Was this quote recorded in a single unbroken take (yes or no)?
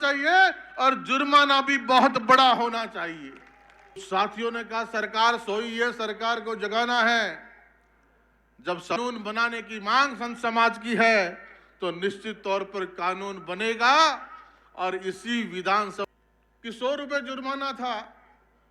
no